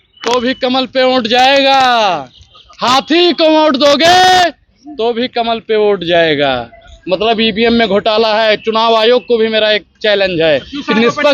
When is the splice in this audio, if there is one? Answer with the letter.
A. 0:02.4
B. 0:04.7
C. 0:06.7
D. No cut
D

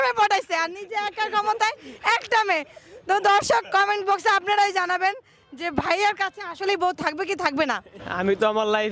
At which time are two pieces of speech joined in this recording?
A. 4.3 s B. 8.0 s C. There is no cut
B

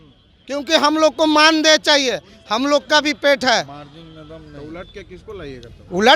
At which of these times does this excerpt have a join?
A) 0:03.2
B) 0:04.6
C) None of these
C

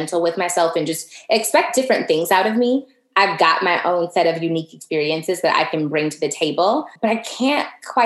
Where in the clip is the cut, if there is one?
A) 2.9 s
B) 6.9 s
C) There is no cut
B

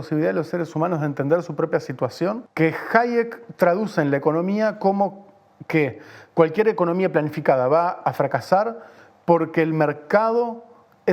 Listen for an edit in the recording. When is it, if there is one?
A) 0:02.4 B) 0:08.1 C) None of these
A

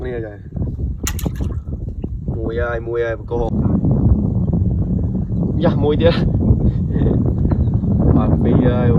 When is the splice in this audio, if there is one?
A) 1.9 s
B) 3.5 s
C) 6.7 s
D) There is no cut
B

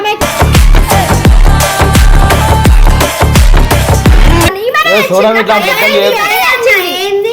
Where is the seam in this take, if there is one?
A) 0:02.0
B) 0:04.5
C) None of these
B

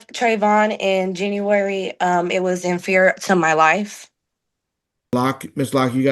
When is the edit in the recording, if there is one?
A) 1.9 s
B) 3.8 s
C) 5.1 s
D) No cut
C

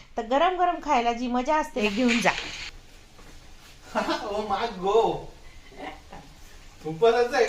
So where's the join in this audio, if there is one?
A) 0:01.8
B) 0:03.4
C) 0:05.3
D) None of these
A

